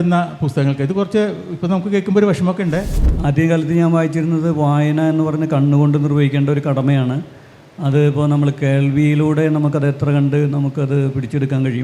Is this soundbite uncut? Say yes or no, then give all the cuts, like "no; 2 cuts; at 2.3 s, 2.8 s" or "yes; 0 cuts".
no; 1 cut; at 2.9 s